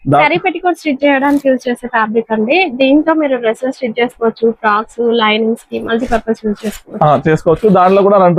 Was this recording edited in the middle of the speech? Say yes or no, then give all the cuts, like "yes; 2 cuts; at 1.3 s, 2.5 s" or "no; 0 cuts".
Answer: no; 0 cuts